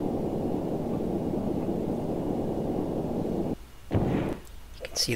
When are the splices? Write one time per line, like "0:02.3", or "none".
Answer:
0:00.9
0:03.5